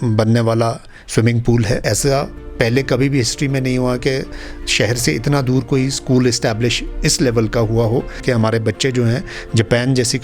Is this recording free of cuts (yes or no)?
no